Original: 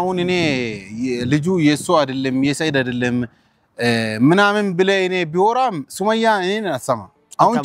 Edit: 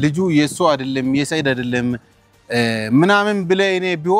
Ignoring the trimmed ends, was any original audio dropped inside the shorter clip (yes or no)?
no